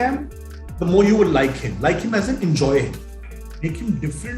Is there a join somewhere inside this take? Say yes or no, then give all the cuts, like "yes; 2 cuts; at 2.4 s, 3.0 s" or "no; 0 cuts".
no; 0 cuts